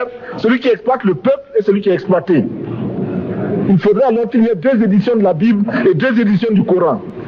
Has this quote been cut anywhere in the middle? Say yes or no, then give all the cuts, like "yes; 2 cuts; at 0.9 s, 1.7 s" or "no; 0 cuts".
no; 0 cuts